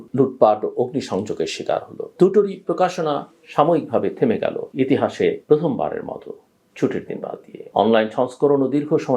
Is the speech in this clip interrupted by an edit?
yes; 4 cuts; at 2.0 s, 4.6 s, 5.4 s, 7.5 s

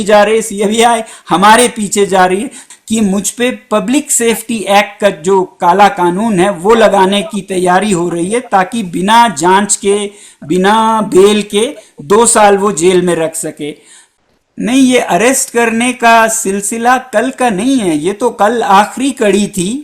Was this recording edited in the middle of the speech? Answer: yes; 2 cuts; at 2.6 s, 14.0 s

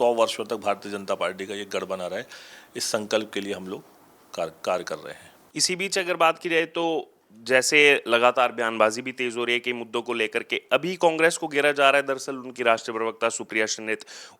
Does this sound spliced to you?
no; 0 cuts

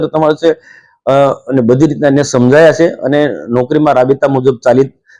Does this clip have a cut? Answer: no; 0 cuts

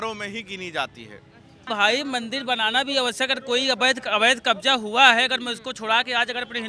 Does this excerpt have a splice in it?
yes; 1 cut; at 1.6 s

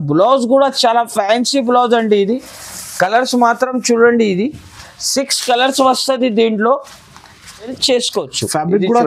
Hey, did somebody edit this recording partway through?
yes; 1 cut; at 7.7 s

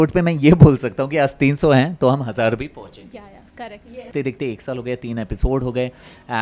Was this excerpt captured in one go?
no; 1 cut; at 4.1 s

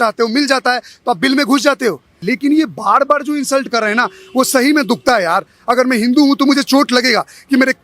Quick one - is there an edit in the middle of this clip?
yes; 1 cut; at 2.2 s

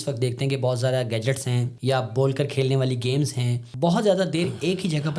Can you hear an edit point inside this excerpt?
yes; 2 cuts; at 1.7 s, 3.7 s

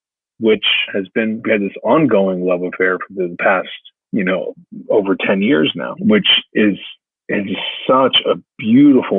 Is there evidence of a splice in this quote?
yes; 1 cut; at 1.3 s

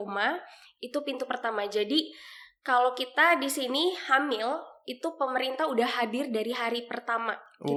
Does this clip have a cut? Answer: no; 0 cuts

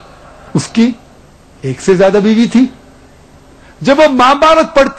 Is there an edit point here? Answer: no; 0 cuts

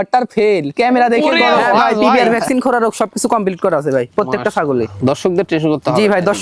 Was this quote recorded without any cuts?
no; 1 cut; at 2.1 s

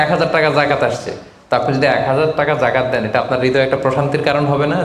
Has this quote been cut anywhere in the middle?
no; 0 cuts

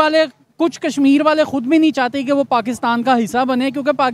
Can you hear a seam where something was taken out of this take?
no; 0 cuts

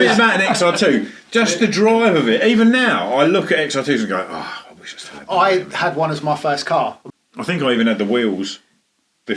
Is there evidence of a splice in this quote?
yes; 1 cut; at 7.0 s

